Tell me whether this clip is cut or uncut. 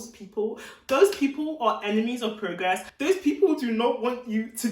cut